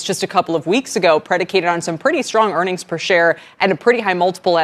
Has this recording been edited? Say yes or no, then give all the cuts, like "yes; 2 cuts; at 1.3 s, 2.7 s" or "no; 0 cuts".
no; 0 cuts